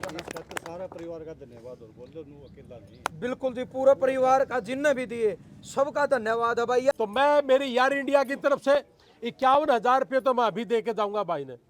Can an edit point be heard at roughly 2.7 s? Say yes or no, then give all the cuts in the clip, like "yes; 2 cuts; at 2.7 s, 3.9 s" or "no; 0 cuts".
no; 1 cut; at 6.9 s